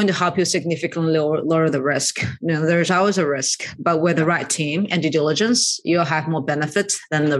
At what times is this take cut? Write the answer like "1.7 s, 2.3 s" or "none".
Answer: none